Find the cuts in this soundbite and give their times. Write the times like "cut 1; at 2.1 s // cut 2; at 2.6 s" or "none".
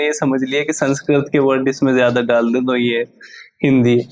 none